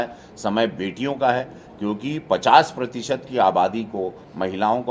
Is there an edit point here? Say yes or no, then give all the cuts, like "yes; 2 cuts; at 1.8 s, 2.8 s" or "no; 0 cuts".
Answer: no; 0 cuts